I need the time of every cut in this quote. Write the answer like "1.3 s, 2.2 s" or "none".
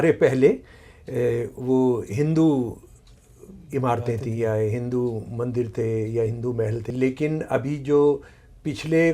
6.8 s